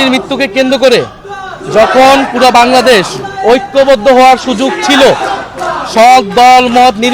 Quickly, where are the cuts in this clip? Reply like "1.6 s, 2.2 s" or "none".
none